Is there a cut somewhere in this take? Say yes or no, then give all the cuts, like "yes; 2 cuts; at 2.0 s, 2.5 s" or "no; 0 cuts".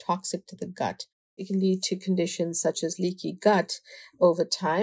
yes; 1 cut; at 1.4 s